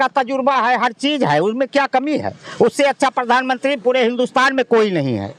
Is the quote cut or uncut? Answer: uncut